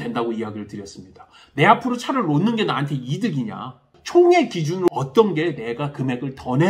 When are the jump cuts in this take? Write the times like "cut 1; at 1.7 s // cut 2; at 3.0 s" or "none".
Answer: cut 1; at 3.9 s // cut 2; at 4.9 s